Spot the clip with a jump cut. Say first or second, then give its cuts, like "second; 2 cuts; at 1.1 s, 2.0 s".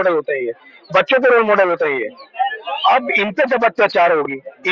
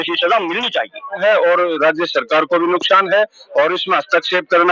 second; 1 cut; at 1.2 s